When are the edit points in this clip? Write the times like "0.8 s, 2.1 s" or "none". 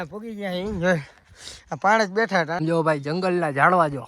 2.6 s